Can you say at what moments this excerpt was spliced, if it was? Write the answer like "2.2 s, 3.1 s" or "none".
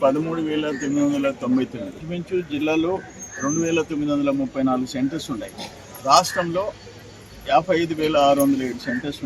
2.0 s